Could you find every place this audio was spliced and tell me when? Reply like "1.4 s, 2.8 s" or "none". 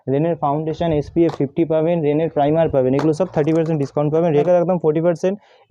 4.4 s